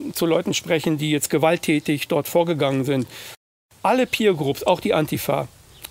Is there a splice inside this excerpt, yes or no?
yes